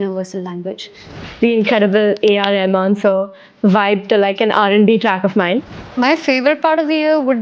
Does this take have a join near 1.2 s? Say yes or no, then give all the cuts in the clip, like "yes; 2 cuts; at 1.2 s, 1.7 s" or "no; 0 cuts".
yes; 2 cuts; at 1.2 s, 5.8 s